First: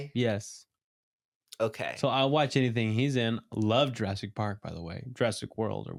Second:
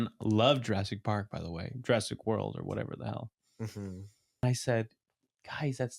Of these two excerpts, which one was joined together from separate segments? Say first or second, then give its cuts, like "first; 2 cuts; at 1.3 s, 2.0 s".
second; 1 cut; at 4.4 s